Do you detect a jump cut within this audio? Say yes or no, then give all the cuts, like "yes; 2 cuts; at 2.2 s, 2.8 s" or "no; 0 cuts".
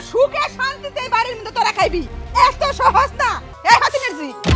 yes; 1 cut; at 3.5 s